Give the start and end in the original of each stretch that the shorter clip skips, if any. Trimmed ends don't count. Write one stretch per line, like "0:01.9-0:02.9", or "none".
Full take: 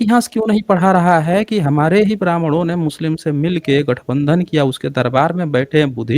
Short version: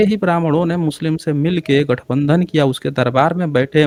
none